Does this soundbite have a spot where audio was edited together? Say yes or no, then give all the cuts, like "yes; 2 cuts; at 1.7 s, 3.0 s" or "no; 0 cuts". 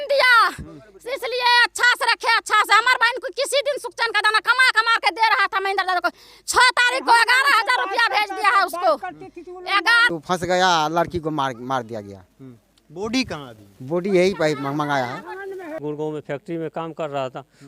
yes; 2 cuts; at 10.0 s, 15.8 s